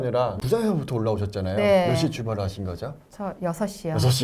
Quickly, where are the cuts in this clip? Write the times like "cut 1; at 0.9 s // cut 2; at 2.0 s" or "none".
none

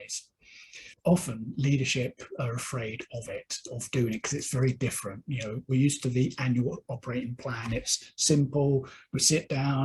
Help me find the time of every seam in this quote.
cut 1; at 0.9 s

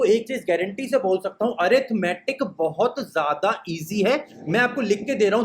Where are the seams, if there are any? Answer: cut 1; at 4.3 s

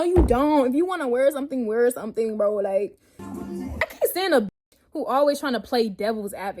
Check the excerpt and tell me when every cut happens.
cut 1; at 3.4 s

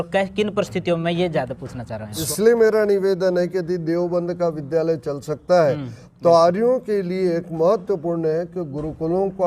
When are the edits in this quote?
cut 1; at 2.2 s

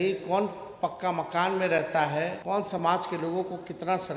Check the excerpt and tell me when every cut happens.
cut 1; at 2.4 s

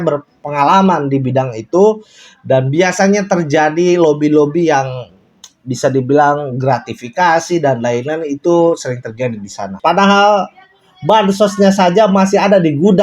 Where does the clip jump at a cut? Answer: cut 1; at 9.8 s

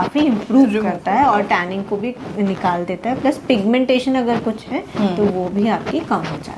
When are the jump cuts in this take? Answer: none

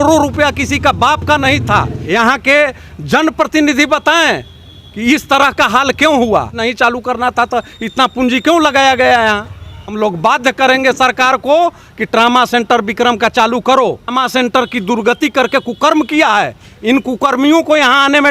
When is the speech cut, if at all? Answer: cut 1; at 2.0 s // cut 2; at 6.6 s // cut 3; at 9.5 s // cut 4; at 14.1 s

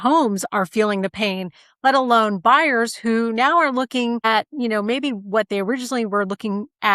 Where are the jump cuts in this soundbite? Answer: cut 1; at 4.2 s

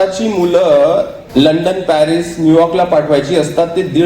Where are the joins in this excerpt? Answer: cut 1; at 1.2 s

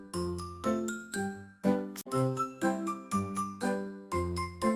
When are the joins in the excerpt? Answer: none

